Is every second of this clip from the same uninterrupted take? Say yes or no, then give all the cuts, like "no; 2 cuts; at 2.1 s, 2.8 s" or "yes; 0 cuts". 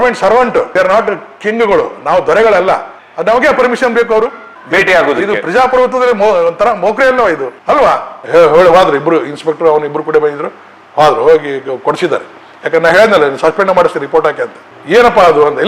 no; 2 cuts; at 8.1 s, 14.6 s